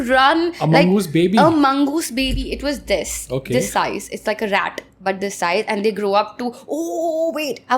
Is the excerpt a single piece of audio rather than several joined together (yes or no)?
yes